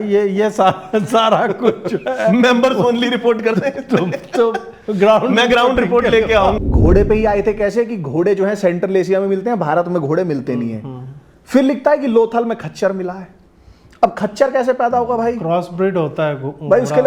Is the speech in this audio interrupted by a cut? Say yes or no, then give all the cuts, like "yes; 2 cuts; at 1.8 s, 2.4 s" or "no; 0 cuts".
yes; 1 cut; at 6.6 s